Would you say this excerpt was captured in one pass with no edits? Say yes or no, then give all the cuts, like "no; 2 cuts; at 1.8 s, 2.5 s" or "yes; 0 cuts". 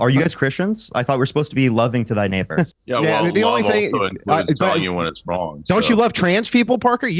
no; 1 cut; at 2.8 s